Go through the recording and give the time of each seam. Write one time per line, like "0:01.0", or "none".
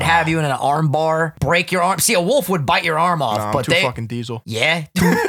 0:01.4
0:04.4